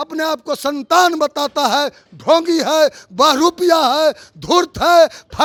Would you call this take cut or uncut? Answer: uncut